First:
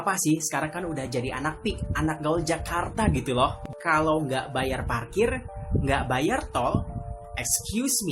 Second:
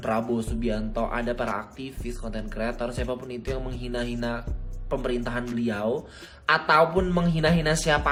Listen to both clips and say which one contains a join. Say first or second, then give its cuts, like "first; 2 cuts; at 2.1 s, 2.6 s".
first; 1 cut; at 3.6 s